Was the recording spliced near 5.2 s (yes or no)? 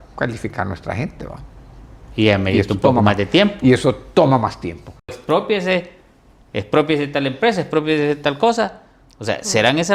yes